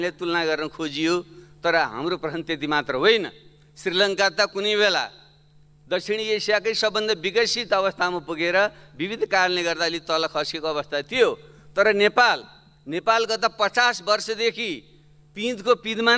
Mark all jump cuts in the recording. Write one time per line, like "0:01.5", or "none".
none